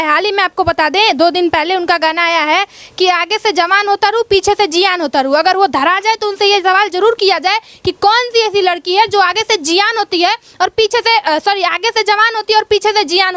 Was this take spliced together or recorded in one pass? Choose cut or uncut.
uncut